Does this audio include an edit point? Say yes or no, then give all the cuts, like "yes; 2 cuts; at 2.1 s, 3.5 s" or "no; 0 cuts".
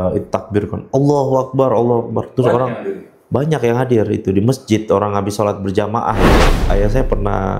yes; 1 cut; at 6.6 s